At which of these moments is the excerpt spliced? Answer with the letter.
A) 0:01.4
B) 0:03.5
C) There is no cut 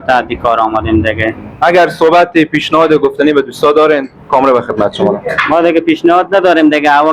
A